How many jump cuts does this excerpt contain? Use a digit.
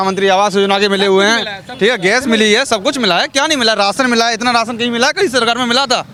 0